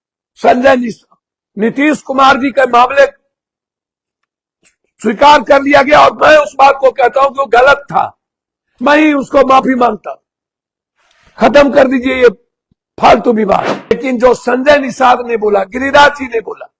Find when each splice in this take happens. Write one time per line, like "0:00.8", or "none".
0:13.9